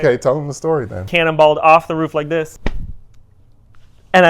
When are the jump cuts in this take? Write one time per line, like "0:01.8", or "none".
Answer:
0:01.1
0:02.6